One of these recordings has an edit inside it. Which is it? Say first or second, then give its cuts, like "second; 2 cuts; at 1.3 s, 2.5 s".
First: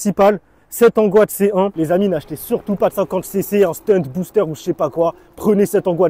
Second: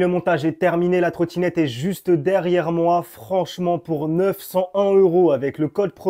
first; 1 cut; at 1.9 s